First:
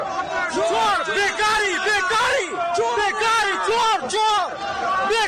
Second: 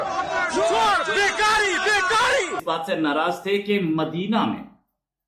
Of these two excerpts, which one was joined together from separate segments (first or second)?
second